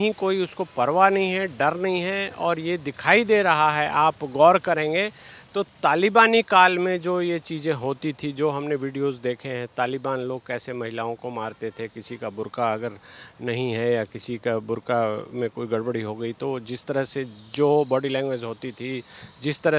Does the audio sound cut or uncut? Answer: uncut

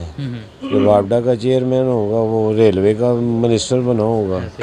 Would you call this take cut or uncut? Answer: uncut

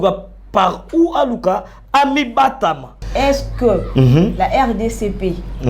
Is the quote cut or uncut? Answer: cut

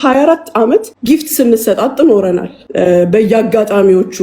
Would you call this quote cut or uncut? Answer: cut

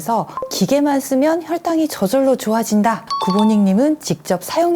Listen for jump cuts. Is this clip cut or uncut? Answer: cut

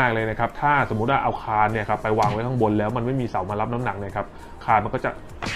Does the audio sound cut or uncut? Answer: uncut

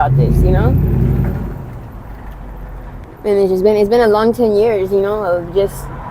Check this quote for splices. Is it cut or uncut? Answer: cut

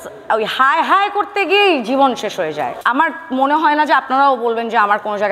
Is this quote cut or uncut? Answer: cut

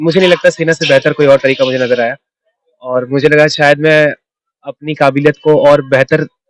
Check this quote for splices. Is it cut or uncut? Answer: uncut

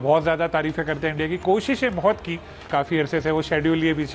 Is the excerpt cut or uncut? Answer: cut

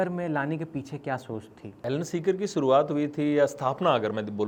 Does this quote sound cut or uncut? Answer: uncut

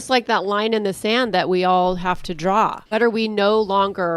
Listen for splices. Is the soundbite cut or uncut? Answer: cut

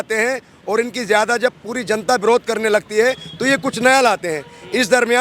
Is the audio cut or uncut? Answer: uncut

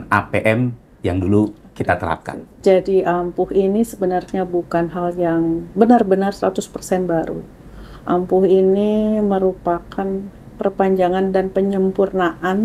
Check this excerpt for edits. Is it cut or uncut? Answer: uncut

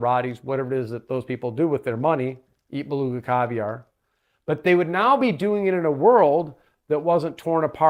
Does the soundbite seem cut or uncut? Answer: uncut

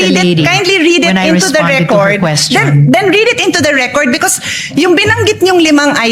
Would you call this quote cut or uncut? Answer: uncut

